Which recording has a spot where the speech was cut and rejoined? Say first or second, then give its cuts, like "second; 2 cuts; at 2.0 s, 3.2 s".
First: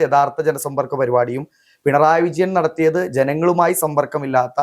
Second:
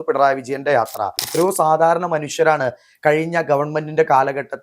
second; 1 cut; at 1.2 s